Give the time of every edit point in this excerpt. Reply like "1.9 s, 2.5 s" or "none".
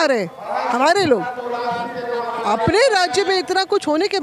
none

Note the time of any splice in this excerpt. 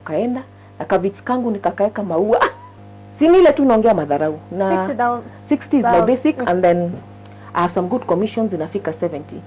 2.7 s

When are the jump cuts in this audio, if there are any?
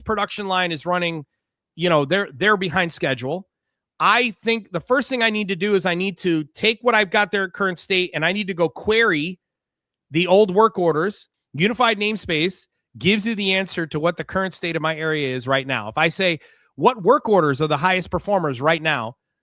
11.3 s

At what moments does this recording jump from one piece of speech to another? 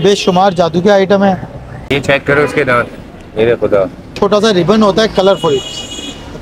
4.1 s

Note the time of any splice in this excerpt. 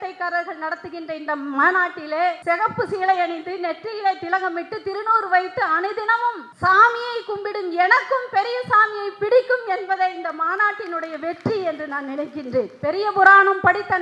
2.4 s, 6.5 s, 12.7 s

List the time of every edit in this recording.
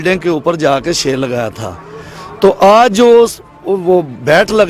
none

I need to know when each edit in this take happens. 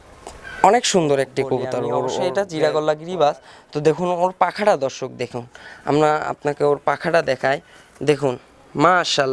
2.3 s

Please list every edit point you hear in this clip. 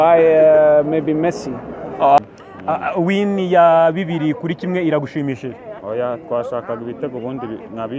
2.2 s

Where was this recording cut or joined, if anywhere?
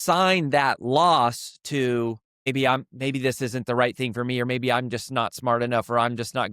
2.3 s

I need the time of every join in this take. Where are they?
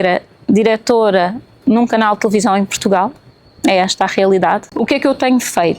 4.7 s

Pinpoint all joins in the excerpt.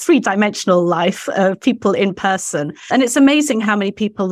2.9 s

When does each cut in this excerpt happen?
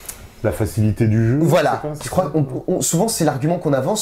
none

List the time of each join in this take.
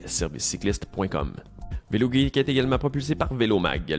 1.7 s

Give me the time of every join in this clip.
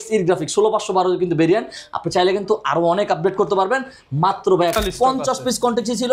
4.7 s

